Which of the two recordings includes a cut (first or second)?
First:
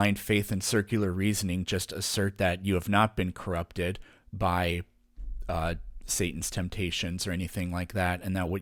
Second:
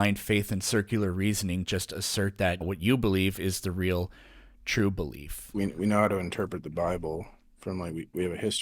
second